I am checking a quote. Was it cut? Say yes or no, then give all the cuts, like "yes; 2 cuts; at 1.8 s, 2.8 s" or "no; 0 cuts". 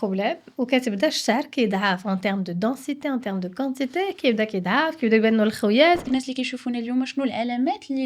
yes; 1 cut; at 6.1 s